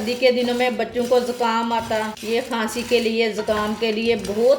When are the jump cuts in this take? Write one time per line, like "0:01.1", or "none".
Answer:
0:02.2

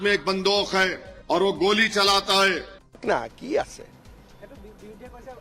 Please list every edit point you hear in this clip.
0:01.1
0:02.9

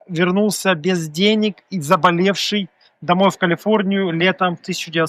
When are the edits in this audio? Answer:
none

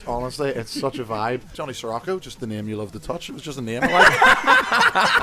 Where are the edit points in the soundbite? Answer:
0:01.5

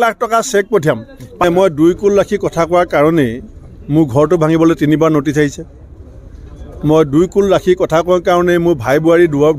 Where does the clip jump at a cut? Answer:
0:01.4

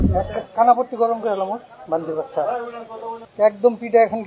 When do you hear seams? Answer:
0:03.2

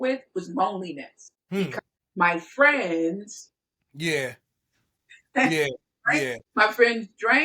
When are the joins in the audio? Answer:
0:01.7
0:06.4

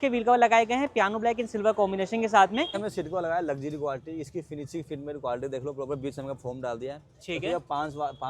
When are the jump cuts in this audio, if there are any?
0:02.8

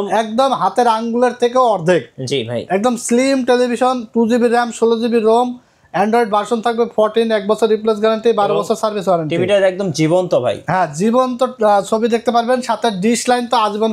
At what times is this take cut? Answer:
none

